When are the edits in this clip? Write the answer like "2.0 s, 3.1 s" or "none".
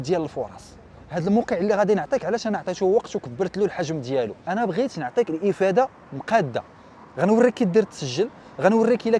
4.4 s